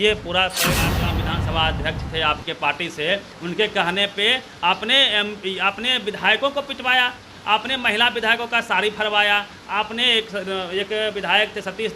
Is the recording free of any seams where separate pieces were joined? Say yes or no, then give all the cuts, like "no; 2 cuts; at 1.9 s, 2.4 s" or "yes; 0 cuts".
no; 1 cut; at 0.9 s